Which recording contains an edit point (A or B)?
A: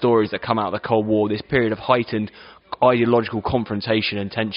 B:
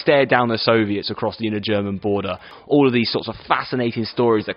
B